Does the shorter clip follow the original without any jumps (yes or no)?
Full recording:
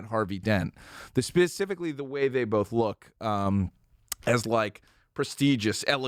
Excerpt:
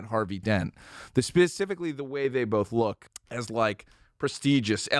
no